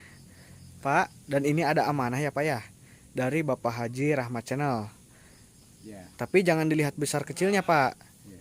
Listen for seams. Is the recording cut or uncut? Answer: uncut